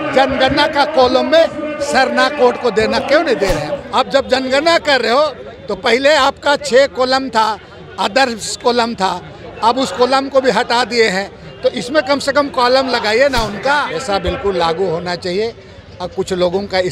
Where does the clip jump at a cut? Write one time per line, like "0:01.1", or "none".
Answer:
0:03.7
0:13.9